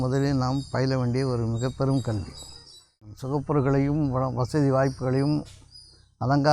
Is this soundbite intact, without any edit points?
no; 1 cut; at 3.1 s

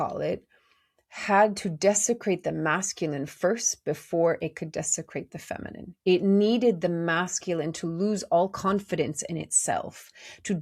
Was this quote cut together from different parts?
no; 0 cuts

